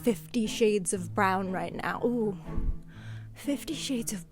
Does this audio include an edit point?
no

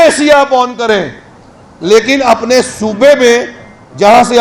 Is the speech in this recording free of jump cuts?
yes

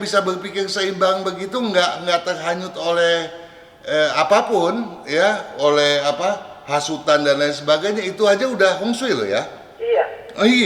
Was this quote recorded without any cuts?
yes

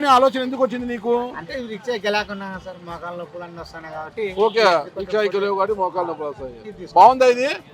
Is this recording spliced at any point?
no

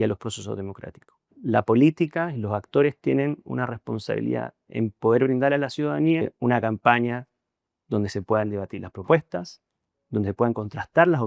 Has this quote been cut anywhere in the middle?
yes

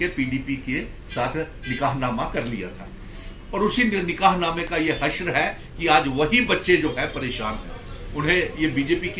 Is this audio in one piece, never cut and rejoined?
yes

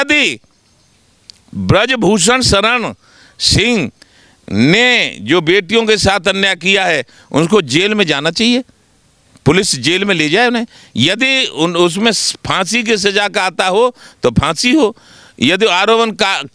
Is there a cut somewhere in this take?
no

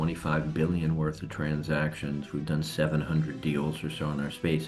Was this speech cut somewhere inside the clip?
no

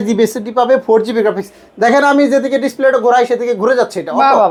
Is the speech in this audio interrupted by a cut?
no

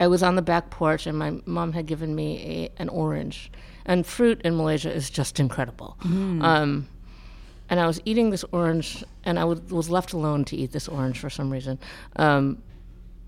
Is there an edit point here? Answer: no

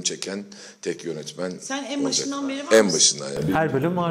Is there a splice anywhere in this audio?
no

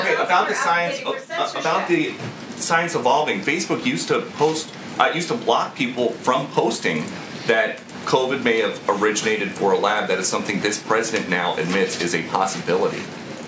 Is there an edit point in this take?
no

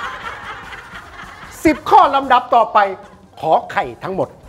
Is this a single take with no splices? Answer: yes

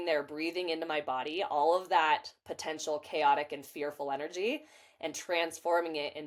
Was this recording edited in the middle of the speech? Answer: no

